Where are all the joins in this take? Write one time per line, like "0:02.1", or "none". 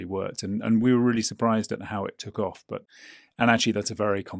0:02.9